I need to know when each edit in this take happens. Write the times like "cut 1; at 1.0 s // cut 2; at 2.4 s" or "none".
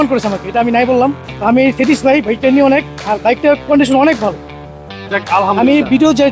cut 1; at 1.3 s